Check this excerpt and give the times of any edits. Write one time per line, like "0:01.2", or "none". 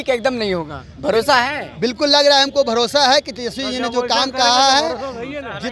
none